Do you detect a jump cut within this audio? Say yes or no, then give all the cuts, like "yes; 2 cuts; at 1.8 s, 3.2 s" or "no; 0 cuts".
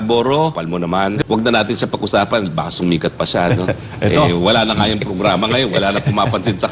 yes; 1 cut; at 1.1 s